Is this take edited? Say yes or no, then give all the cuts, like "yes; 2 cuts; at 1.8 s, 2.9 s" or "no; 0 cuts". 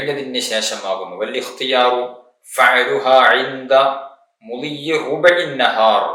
no; 0 cuts